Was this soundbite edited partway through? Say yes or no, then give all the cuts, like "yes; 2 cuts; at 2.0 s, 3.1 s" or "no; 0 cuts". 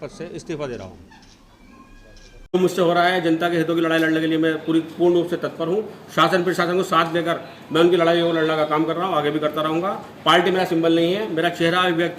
yes; 1 cut; at 2.5 s